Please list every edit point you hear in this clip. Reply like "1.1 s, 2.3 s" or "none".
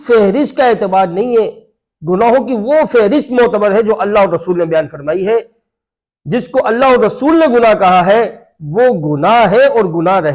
none